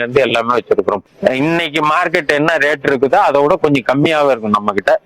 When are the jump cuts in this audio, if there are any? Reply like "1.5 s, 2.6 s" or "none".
1.0 s